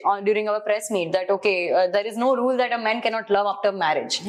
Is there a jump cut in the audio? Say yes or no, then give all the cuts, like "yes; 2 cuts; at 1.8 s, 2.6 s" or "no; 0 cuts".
no; 0 cuts